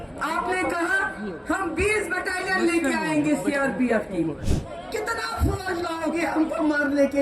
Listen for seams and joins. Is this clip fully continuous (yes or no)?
no